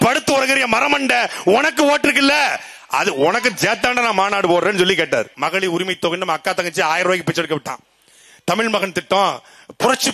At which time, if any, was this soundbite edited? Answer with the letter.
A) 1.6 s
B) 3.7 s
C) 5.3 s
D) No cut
C